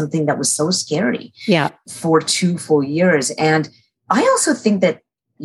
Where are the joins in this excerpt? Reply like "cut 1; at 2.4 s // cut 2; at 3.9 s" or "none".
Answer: cut 1; at 1.8 s